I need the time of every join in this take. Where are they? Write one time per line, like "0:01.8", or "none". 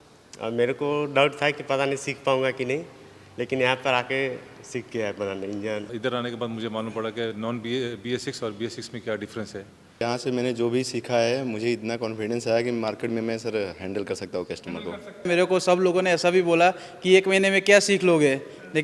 0:05.9
0:10.0
0:15.3